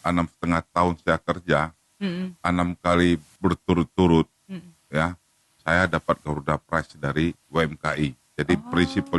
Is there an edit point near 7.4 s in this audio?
yes; 1 cut; at 7.4 s

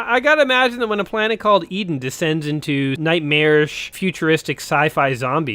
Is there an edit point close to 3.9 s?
yes; 2 cuts; at 3.0 s, 3.9 s

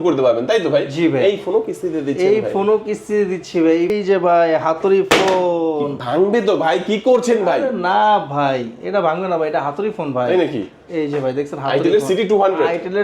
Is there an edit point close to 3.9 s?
yes; 1 cut; at 3.9 s

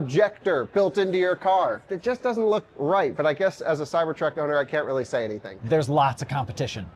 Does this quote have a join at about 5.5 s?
yes; 2 cuts; at 1.9 s, 5.5 s

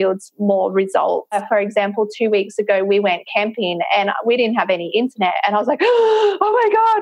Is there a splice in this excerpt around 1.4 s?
yes; 1 cut; at 1.4 s

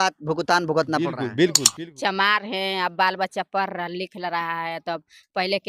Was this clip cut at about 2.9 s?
no; 1 cut; at 1.7 s

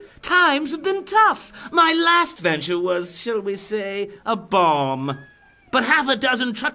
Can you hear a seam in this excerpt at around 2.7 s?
yes; 1 cut; at 2.7 s

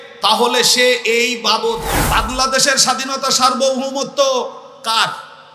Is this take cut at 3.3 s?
no; 1 cut; at 1.9 s

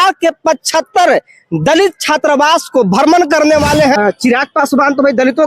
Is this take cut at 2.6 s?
no; 1 cut; at 4.0 s

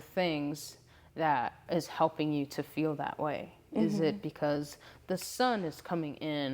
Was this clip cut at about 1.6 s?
yes; 1 cut; at 1.6 s

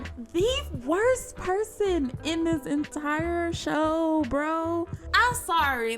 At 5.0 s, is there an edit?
no; 0 cuts

